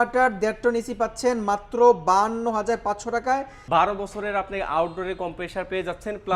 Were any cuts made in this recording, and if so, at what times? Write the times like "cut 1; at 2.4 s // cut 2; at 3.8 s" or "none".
cut 1; at 3.6 s